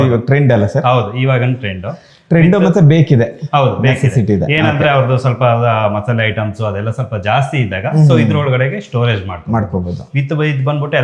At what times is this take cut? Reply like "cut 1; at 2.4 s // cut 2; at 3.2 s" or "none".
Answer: none